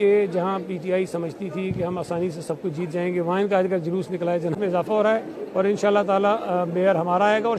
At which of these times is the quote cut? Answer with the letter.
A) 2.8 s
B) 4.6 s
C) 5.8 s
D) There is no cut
B